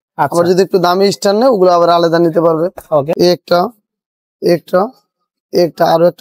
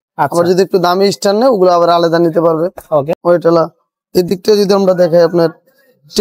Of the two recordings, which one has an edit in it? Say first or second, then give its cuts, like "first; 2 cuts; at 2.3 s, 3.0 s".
first; 1 cut; at 3.1 s